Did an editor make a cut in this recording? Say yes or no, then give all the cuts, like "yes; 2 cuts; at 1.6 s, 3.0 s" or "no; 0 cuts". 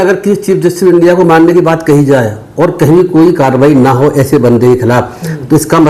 no; 0 cuts